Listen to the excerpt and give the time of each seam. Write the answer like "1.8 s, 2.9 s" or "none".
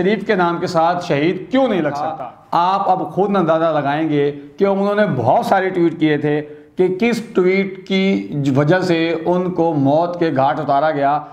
2.1 s